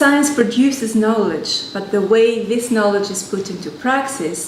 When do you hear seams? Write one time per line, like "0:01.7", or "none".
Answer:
0:01.4